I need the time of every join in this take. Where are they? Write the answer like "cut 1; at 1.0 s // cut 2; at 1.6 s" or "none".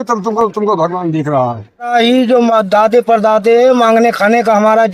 cut 1; at 1.9 s